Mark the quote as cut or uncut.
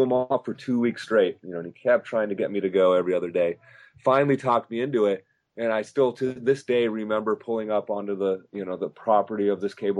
uncut